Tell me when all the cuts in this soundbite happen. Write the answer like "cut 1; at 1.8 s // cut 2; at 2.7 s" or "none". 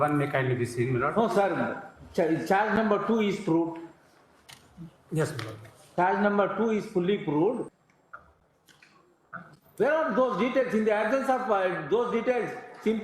cut 1; at 7.7 s

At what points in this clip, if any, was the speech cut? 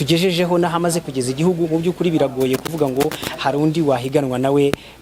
none

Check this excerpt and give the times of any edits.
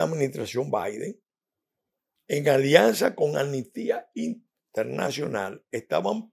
none

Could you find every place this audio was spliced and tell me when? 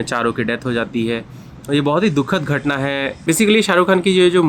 cut 1; at 3.1 s

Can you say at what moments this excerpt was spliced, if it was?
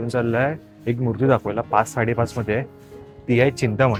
none

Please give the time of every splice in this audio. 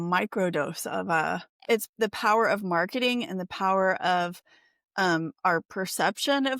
cut 1; at 1.6 s

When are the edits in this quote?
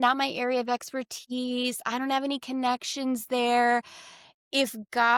none

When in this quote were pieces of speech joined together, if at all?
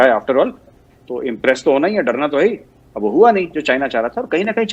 none

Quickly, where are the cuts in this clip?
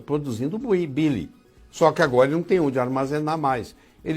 none

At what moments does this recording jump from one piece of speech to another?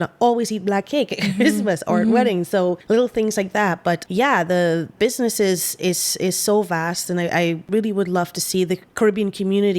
cut 1; at 2.8 s // cut 2; at 4.0 s // cut 3; at 5.0 s // cut 4; at 7.7 s // cut 5; at 8.9 s

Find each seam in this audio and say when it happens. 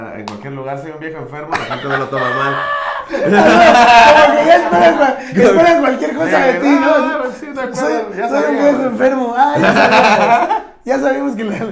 none

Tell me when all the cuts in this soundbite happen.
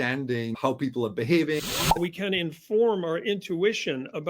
cut 1; at 1.6 s

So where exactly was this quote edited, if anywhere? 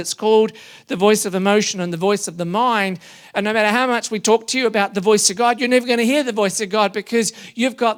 none

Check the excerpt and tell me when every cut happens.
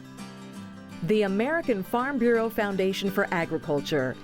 cut 1; at 1.0 s

